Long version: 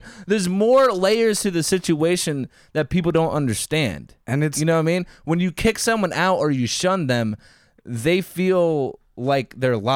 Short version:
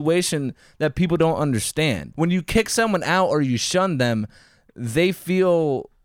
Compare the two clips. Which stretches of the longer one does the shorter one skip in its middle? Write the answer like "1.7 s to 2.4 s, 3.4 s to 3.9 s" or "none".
4.0 s to 5.2 s